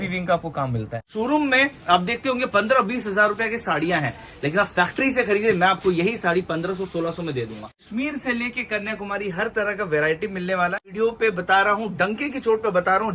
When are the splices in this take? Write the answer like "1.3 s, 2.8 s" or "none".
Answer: 1.0 s, 7.8 s, 10.9 s